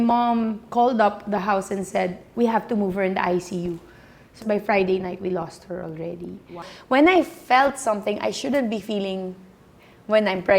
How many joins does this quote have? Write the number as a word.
two